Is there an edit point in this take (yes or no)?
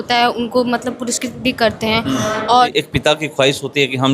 yes